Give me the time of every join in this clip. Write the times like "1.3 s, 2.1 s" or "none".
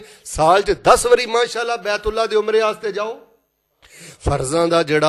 4.0 s